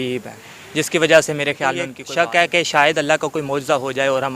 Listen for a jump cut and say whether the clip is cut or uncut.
cut